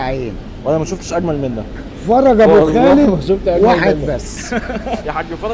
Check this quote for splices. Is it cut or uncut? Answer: uncut